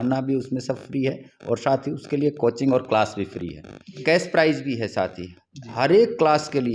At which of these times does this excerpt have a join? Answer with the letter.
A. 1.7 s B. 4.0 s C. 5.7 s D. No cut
B